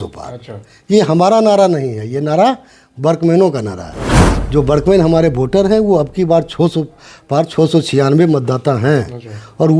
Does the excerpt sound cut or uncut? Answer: uncut